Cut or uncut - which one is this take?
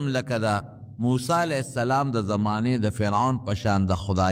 uncut